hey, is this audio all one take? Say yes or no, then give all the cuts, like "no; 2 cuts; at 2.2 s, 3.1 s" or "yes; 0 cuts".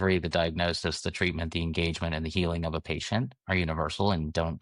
yes; 0 cuts